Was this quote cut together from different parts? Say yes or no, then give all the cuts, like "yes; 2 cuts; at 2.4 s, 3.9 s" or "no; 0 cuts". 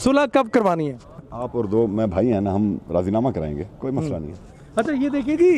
yes; 1 cut; at 1.3 s